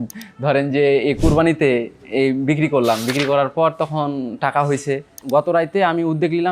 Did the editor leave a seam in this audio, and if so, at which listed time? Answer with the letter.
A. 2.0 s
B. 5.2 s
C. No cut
B